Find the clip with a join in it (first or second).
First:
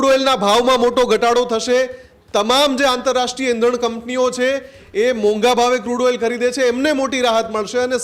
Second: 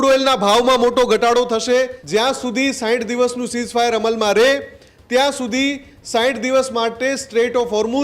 second